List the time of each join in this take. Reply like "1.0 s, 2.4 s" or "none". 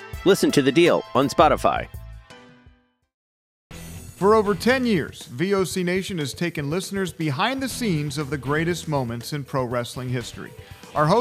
3.5 s